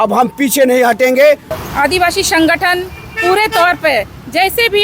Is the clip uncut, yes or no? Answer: no